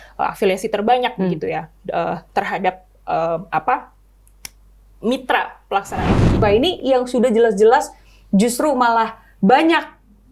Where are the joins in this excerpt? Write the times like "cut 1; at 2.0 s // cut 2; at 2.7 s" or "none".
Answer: cut 1; at 6.3 s